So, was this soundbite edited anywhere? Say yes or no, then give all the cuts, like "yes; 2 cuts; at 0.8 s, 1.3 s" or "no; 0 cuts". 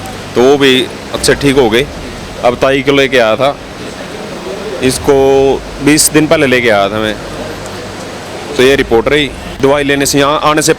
yes; 1 cut; at 9.5 s